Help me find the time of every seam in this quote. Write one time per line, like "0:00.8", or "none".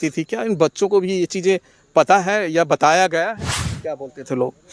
0:03.7